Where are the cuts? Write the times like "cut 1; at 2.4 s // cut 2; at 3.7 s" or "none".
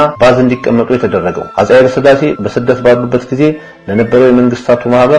cut 1; at 1.5 s

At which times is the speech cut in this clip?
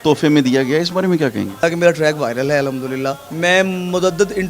cut 1; at 1.6 s // cut 2; at 3.2 s

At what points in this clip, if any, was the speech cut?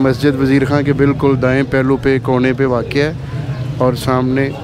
none

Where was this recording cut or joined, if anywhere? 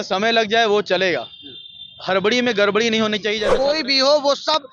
cut 1; at 3.5 s

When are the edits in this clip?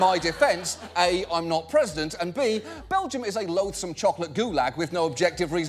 none

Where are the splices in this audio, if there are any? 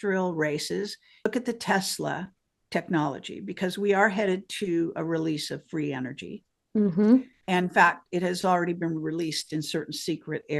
cut 1; at 1.3 s

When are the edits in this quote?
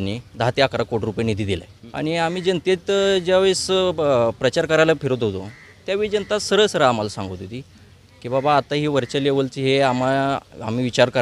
cut 1; at 1.8 s

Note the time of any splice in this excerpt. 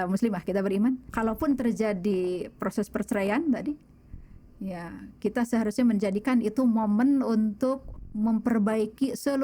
cut 1; at 1.1 s

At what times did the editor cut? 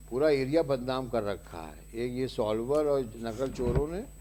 none

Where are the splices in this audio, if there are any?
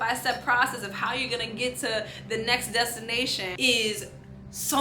cut 1; at 3.6 s

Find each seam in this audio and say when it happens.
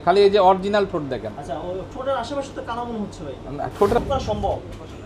cut 1; at 4.0 s

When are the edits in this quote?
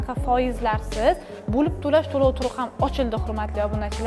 none

